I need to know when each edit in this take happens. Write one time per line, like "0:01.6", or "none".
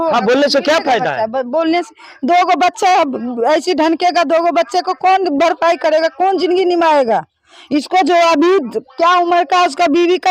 none